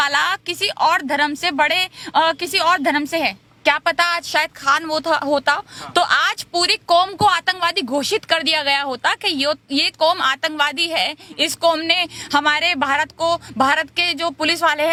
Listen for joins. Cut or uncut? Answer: uncut